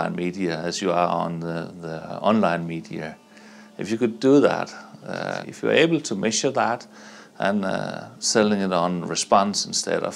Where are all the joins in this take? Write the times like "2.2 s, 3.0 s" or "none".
5.4 s